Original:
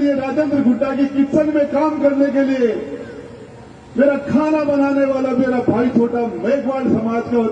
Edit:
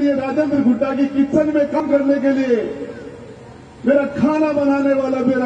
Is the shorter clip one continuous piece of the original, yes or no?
no